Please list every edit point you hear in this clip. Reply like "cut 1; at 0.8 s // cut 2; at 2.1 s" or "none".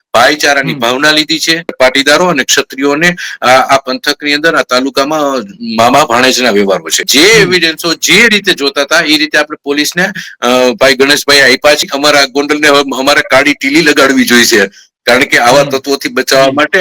cut 1; at 1.7 s // cut 2; at 7.1 s // cut 3; at 11.9 s